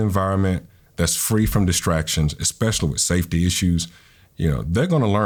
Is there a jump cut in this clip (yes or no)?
no